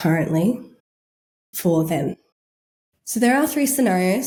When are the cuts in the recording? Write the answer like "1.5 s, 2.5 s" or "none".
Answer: none